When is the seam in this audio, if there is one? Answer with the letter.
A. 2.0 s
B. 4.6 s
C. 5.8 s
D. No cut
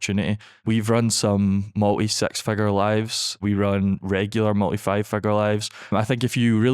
C